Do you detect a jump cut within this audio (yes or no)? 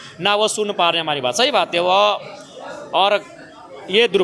no